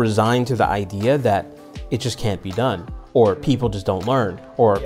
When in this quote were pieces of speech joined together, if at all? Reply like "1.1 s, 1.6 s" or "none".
none